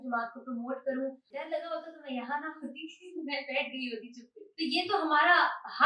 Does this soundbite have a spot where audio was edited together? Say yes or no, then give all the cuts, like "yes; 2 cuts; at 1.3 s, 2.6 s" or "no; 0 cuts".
yes; 2 cuts; at 1.2 s, 4.4 s